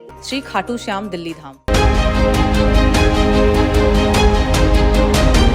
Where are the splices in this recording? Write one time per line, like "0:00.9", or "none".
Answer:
0:01.5